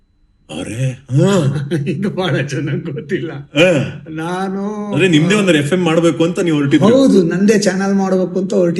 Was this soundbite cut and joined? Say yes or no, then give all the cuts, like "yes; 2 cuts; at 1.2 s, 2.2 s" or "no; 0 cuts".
no; 0 cuts